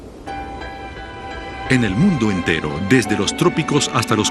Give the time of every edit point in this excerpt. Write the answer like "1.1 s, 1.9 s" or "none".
none